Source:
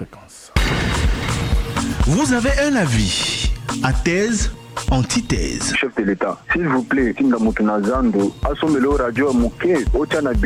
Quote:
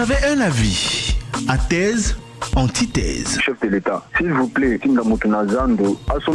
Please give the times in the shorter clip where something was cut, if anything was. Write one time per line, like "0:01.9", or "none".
none